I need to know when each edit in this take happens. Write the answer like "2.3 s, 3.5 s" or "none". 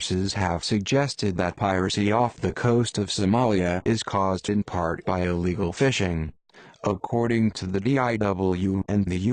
5.9 s